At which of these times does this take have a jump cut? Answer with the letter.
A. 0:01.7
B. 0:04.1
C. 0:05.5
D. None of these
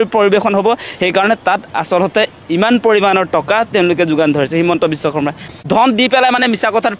C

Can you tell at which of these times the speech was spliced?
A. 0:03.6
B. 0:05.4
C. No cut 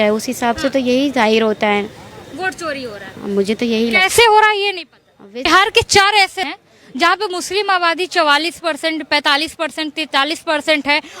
B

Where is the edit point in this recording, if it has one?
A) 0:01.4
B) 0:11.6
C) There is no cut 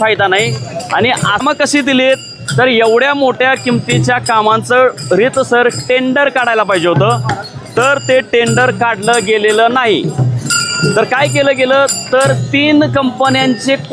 A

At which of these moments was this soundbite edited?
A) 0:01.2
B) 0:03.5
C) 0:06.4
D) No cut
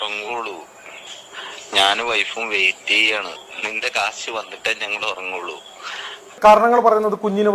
C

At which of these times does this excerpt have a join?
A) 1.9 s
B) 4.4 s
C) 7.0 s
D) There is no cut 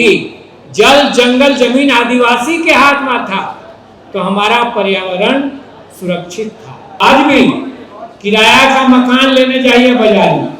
C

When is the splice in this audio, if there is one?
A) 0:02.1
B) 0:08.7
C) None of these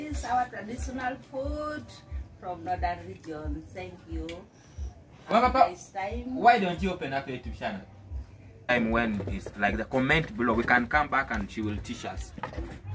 B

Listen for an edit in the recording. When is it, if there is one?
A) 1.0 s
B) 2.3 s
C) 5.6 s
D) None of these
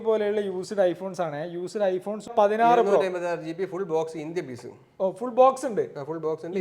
B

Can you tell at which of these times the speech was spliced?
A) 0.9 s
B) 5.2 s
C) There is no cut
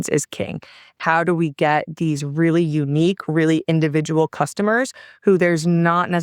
A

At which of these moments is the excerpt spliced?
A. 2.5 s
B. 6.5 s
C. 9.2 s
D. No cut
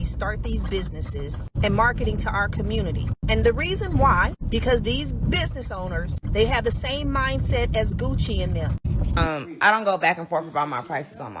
C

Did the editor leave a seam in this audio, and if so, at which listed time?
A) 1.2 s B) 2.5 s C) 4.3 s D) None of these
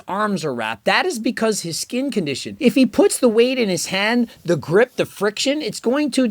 B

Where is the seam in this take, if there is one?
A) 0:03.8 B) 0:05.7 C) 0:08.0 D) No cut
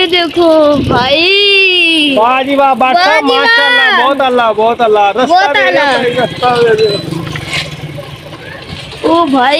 D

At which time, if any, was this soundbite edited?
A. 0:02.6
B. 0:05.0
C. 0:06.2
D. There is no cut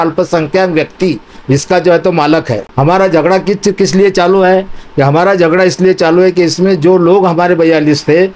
A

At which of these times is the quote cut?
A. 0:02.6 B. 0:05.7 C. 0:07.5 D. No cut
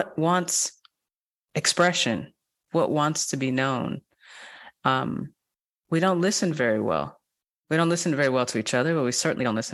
A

